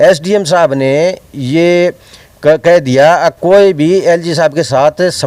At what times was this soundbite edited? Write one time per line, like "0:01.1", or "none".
none